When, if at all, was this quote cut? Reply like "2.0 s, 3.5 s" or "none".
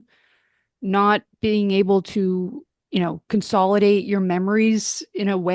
none